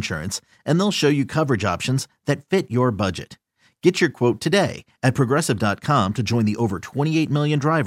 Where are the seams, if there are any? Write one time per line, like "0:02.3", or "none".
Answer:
none